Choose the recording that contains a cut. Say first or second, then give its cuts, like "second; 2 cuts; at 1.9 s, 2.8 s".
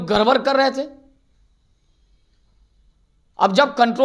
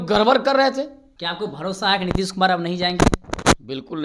second; 1 cut; at 1.1 s